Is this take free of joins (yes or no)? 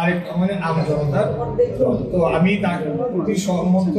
yes